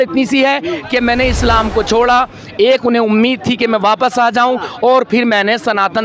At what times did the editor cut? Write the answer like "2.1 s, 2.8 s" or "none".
none